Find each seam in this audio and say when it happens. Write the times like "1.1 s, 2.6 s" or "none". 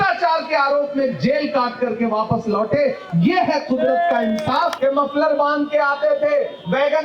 4.7 s

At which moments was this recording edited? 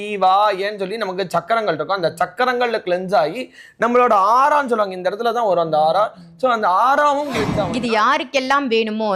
7.6 s

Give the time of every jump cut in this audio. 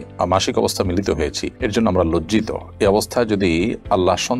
none

